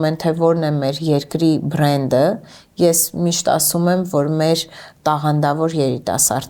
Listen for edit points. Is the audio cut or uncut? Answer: uncut